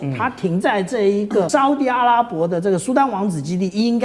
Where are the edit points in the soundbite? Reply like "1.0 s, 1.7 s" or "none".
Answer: 1.5 s